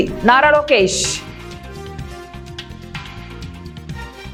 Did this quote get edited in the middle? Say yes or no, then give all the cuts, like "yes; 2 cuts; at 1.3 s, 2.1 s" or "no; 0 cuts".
no; 0 cuts